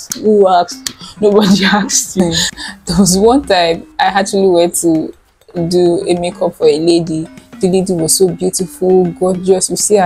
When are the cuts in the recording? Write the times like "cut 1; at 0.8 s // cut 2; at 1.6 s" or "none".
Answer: cut 1; at 2.2 s

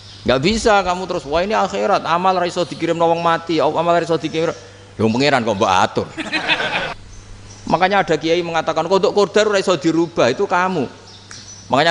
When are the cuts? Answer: cut 1; at 7.0 s

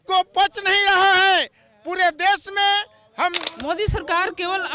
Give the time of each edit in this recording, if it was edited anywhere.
cut 1; at 3.5 s

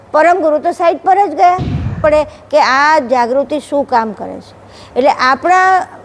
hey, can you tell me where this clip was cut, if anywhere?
cut 1; at 2.0 s

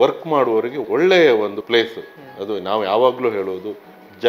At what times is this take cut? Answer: cut 1; at 0.8 s // cut 2; at 1.6 s

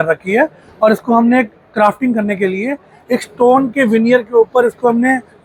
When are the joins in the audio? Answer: none

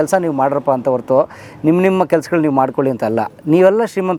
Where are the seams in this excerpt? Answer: none

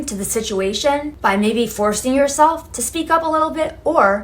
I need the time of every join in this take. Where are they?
cut 1; at 1.1 s

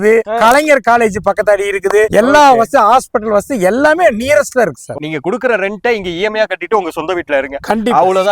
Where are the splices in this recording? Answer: cut 1; at 5.0 s

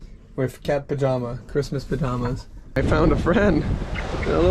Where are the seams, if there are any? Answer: cut 1; at 2.8 s

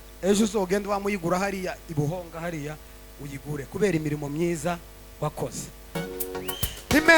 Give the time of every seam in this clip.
cut 1; at 6.1 s

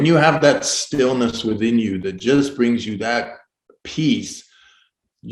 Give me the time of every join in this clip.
none

